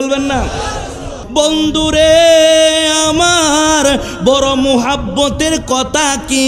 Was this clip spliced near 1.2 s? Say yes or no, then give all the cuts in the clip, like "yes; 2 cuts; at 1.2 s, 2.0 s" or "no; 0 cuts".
yes; 1 cut; at 1.2 s